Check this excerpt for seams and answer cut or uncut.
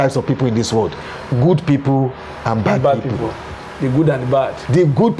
uncut